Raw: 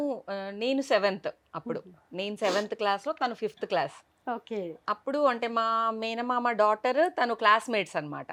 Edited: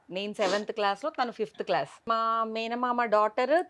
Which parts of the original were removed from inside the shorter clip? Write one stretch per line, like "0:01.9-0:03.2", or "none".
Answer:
0:04.1-0:05.5